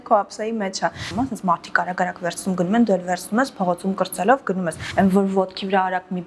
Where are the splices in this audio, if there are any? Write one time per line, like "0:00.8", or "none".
0:01.0
0:04.8